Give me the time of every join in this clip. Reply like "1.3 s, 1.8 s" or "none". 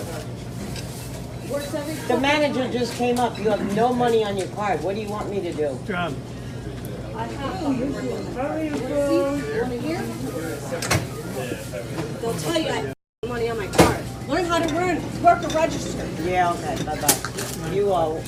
none